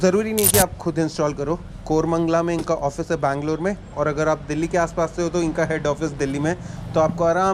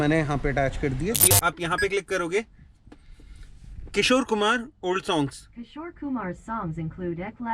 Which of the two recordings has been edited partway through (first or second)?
second